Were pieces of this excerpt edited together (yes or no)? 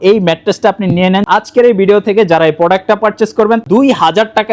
yes